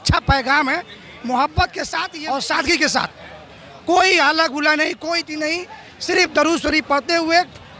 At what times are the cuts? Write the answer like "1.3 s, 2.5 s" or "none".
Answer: 2.1 s

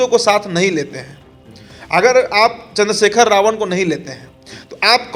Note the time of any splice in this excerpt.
none

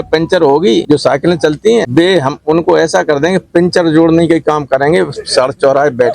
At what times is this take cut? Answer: 0.8 s, 1.9 s

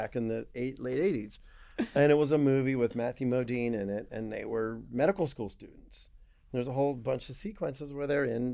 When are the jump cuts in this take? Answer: 1.6 s

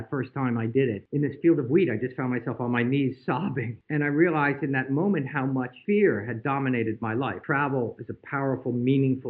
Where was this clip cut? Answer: 1.0 s, 3.7 s, 5.7 s, 7.4 s

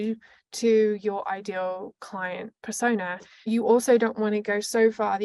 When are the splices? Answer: 3.2 s

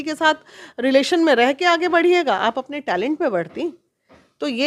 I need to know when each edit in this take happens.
none

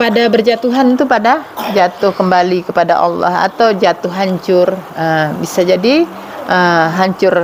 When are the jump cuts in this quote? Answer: none

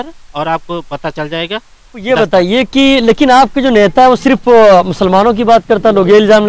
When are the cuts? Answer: 2.1 s

